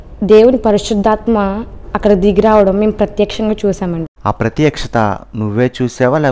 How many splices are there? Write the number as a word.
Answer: one